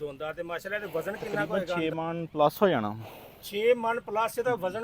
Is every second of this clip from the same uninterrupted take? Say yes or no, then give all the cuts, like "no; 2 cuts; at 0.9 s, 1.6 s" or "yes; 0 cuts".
yes; 0 cuts